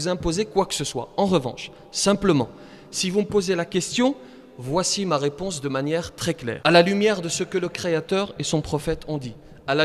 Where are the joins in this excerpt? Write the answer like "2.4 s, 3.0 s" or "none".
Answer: none